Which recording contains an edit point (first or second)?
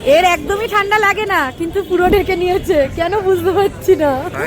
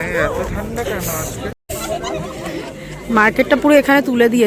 second